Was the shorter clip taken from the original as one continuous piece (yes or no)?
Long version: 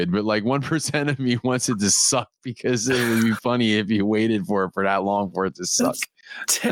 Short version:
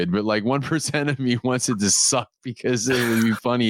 yes